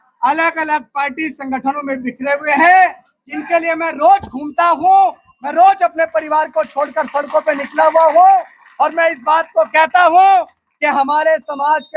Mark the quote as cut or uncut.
uncut